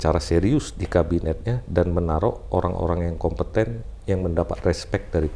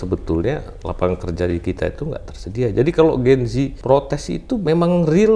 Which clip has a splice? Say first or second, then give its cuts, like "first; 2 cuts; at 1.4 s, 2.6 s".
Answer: second; 2 cuts; at 3.8 s, 4.5 s